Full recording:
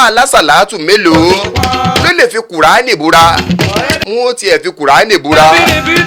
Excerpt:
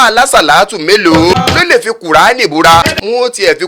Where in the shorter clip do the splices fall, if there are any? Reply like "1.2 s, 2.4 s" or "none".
1.4 s, 2.8 s